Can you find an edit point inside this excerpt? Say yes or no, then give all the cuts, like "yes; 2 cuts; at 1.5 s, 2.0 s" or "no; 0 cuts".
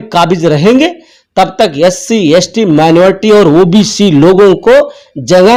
no; 0 cuts